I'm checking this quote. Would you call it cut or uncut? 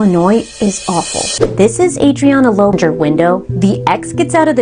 cut